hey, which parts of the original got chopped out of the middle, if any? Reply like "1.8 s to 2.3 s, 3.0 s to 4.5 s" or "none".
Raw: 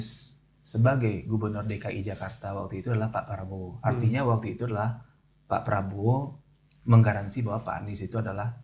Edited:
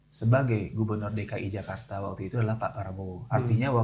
none